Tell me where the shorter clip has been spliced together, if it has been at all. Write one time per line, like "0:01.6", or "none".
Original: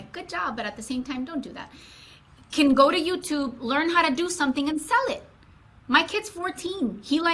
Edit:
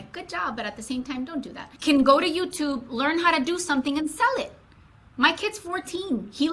0:01.6